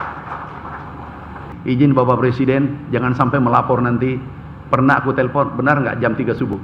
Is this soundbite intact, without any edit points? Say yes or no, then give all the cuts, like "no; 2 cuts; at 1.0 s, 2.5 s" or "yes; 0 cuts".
no; 1 cut; at 1.5 s